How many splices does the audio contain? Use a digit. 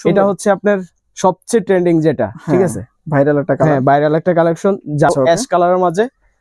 1